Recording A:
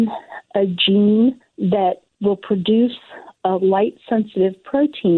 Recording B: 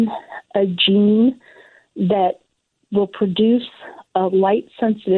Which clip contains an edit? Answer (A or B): A